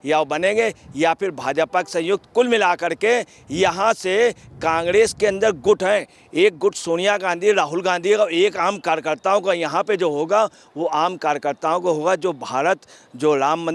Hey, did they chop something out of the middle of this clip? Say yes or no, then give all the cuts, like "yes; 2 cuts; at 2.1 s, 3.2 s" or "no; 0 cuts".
no; 0 cuts